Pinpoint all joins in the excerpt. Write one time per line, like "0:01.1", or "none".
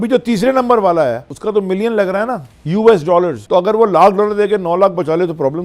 0:01.3
0:02.5
0:03.4